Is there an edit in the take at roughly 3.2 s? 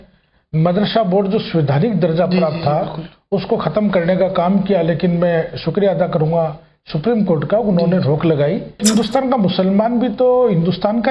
no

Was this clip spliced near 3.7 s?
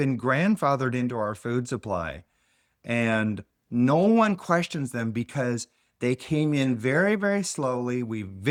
no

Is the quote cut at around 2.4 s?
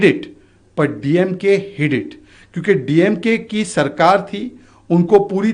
no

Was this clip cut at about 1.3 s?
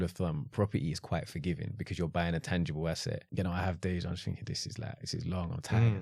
no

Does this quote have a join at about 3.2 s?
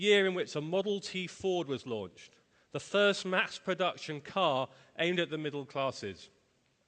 no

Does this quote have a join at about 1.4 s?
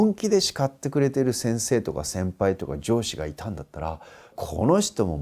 yes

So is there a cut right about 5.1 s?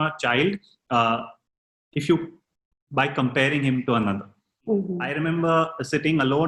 yes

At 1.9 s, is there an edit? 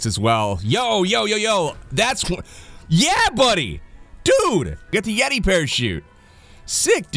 no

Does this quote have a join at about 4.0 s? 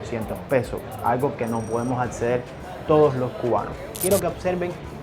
yes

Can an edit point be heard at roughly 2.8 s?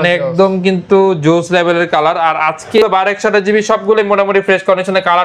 yes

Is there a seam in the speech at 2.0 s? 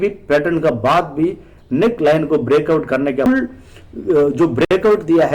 no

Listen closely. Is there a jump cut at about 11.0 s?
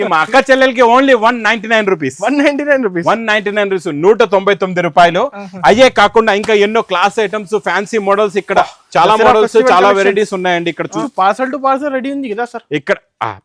yes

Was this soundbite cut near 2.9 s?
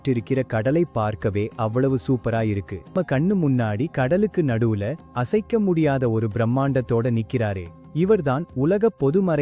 yes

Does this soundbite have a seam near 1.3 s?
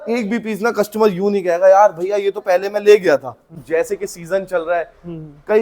no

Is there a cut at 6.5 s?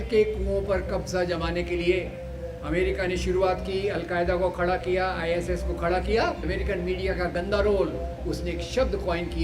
yes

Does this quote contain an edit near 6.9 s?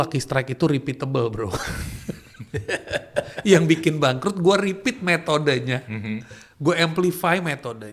no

